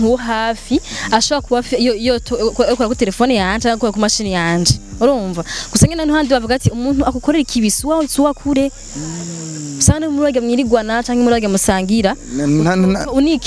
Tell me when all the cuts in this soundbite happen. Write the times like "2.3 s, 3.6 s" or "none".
none